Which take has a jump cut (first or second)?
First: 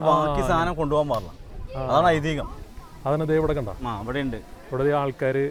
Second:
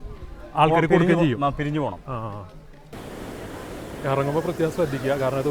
second